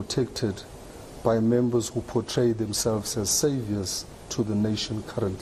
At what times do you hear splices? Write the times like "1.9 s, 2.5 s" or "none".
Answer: none